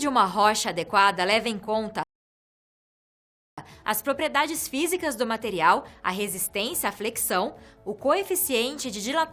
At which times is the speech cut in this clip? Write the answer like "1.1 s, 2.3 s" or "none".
none